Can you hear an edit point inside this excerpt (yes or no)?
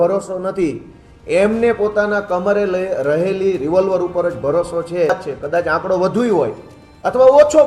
yes